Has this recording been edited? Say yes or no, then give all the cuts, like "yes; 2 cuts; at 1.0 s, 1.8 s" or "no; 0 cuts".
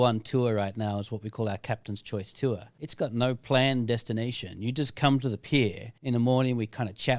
yes; 2 cuts; at 2.8 s, 5.9 s